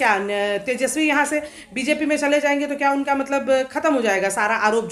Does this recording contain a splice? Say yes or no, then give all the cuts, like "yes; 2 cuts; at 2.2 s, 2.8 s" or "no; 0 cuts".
no; 0 cuts